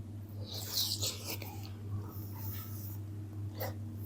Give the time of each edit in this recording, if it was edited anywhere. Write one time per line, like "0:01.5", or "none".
none